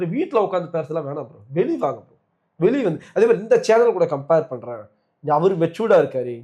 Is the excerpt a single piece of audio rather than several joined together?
yes; 0 cuts

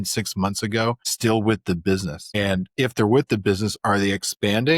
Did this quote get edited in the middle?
yes; 2 cuts; at 1.1 s, 2.4 s

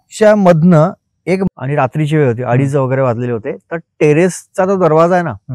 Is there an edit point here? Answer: yes; 1 cut; at 1.4 s

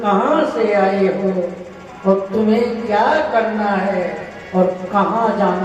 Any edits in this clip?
no; 0 cuts

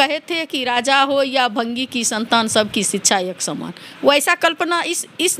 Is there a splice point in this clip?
no; 0 cuts

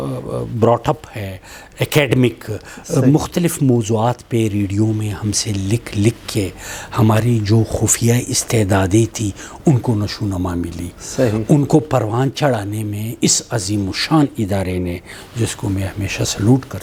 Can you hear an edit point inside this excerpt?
no; 0 cuts

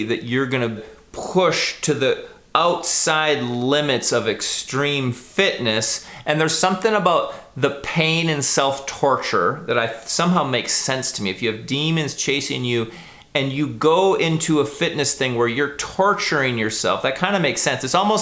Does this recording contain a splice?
yes; 1 cut; at 1.0 s

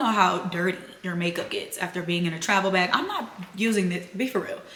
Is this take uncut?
yes; 0 cuts

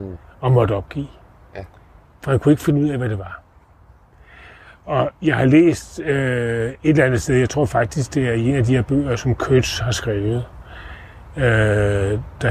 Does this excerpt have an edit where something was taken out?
no; 0 cuts

